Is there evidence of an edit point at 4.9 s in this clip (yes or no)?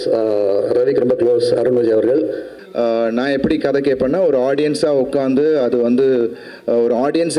no